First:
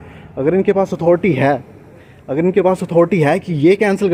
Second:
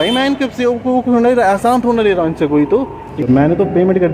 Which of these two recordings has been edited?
second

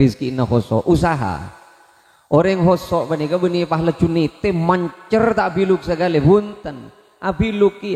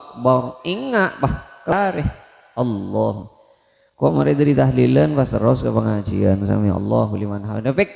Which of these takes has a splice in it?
second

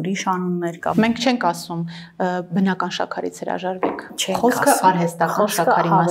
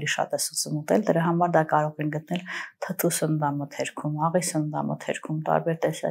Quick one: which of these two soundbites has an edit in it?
first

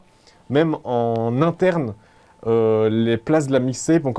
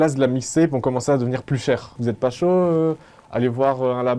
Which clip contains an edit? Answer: second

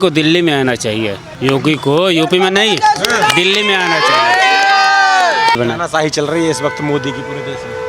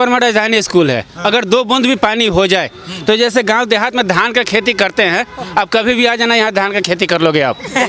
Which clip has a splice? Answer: first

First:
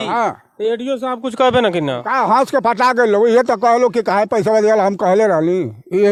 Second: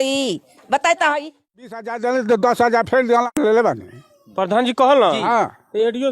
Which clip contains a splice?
second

